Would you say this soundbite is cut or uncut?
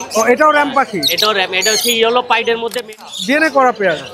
cut